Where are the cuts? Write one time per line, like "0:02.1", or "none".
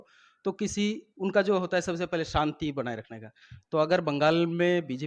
none